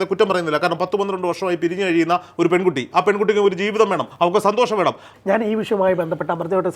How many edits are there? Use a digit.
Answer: 1